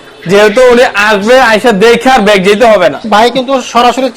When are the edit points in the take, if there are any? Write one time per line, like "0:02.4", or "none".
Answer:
0:03.1